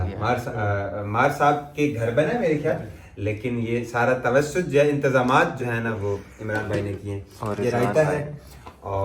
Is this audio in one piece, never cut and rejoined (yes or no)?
yes